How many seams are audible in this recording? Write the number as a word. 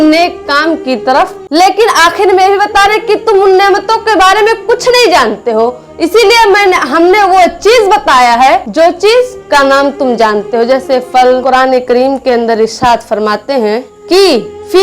three